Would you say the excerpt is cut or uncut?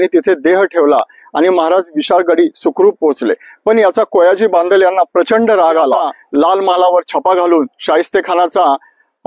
cut